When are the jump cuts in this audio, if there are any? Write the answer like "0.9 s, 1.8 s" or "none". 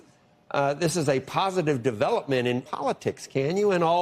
2.6 s